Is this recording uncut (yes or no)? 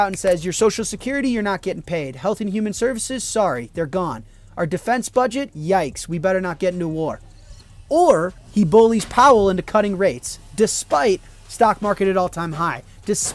no